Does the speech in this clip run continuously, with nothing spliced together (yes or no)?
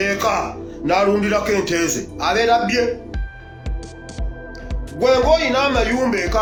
yes